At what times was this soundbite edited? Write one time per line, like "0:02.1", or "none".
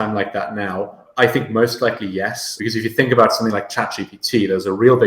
0:01.0
0:02.5